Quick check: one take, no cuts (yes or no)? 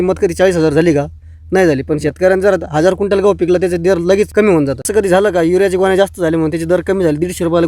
no